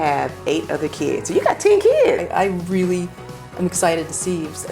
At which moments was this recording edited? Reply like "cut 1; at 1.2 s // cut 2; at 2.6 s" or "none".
cut 1; at 2.2 s